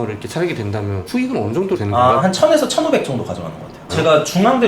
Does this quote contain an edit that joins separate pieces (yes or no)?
yes